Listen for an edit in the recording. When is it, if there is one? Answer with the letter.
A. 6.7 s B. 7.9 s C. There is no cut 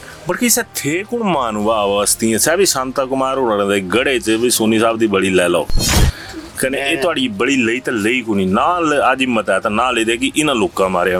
C